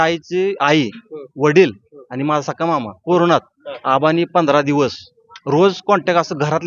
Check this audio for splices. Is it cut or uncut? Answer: uncut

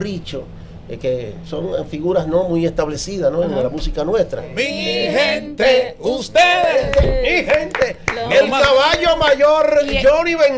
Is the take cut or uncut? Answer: cut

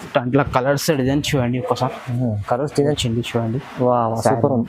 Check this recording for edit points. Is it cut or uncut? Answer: cut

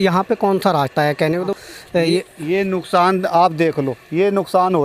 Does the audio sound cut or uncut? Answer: cut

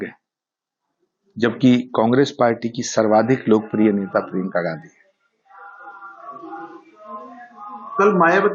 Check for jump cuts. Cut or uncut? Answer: uncut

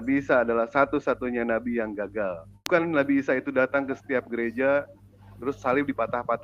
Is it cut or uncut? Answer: cut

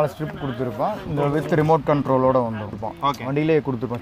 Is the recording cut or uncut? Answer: cut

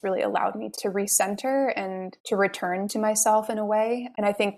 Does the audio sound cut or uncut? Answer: uncut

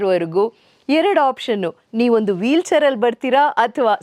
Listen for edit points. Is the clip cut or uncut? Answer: uncut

